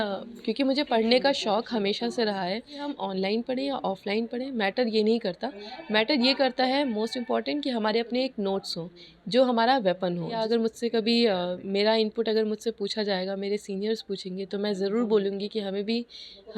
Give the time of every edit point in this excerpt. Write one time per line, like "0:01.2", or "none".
0:02.9
0:10.4